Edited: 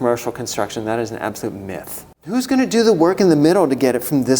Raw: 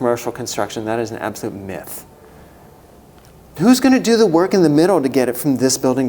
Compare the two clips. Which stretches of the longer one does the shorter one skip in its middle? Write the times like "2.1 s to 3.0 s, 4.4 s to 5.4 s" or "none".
2.4 s to 3.7 s